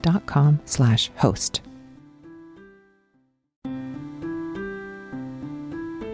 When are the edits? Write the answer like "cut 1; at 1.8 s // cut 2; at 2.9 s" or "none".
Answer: cut 1; at 3.5 s